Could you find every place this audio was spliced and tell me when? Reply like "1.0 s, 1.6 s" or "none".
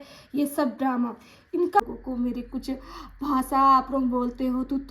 1.8 s

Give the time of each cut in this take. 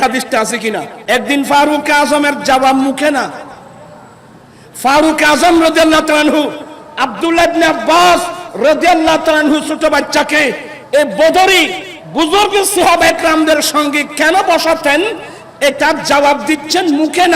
0.9 s

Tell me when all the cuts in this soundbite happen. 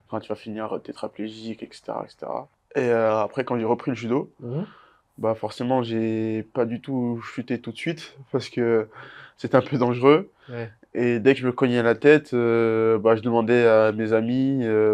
2.6 s

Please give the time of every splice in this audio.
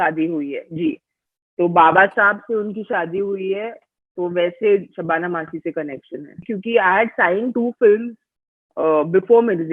6.5 s

